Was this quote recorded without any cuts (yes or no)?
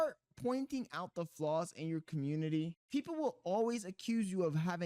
no